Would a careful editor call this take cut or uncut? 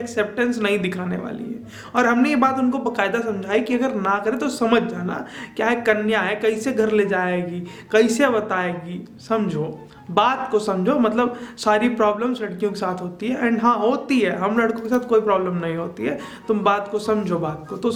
uncut